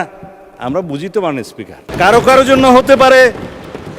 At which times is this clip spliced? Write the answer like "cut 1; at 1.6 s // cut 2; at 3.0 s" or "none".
cut 1; at 1.9 s